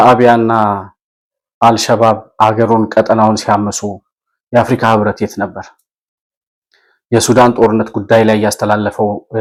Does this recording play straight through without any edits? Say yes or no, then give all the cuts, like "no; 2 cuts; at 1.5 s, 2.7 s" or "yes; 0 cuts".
yes; 0 cuts